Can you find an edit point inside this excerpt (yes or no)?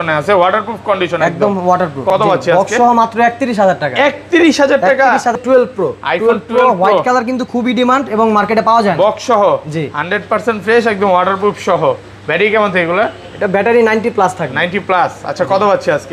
yes